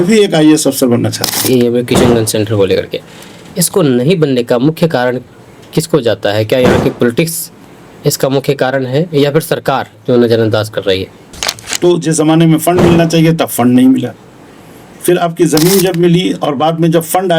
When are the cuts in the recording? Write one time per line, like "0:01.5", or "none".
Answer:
0:01.5
0:11.7